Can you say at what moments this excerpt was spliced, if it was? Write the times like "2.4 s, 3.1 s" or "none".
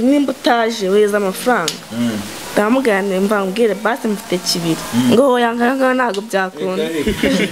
none